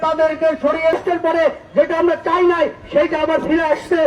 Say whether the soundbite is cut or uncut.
cut